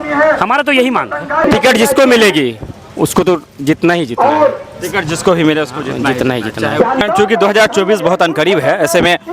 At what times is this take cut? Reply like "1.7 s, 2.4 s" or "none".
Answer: 1.5 s, 7.0 s